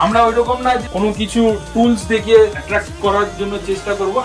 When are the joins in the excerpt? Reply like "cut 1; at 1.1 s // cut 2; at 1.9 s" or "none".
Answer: cut 1; at 0.8 s // cut 2; at 2.6 s